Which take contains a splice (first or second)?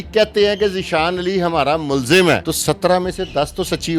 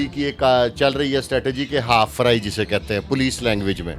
first